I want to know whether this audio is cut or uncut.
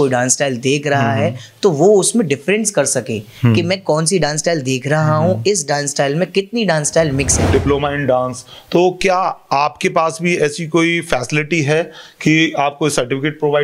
cut